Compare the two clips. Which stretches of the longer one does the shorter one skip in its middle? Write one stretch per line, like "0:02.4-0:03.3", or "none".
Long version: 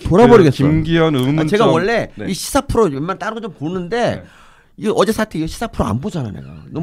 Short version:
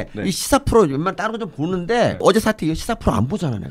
0:04.2-0:04.9